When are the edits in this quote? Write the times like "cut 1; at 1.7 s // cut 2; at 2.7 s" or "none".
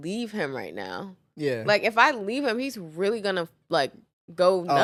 none

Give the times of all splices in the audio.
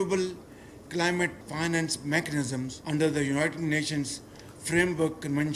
cut 1; at 1.4 s // cut 2; at 2.8 s

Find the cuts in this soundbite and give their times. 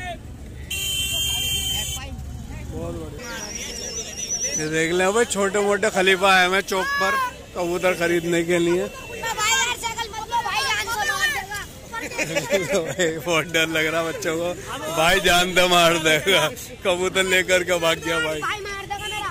cut 1; at 3.2 s

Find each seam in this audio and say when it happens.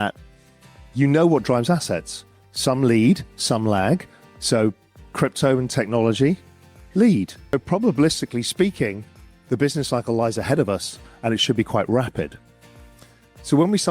cut 1; at 7.5 s

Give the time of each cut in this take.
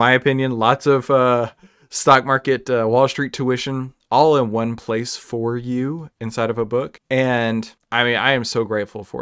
cut 1; at 7.0 s // cut 2; at 7.8 s

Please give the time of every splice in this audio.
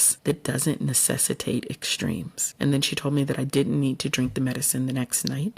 cut 1; at 2.4 s

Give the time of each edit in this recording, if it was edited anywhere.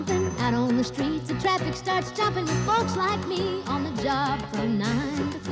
none

